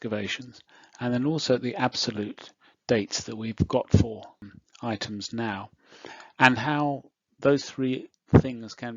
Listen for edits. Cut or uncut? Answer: cut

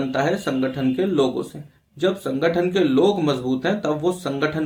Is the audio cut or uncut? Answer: uncut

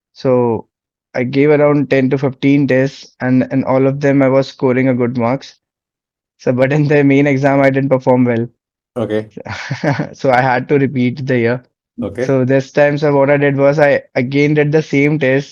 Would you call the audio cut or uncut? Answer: uncut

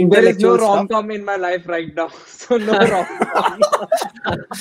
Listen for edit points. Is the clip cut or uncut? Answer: uncut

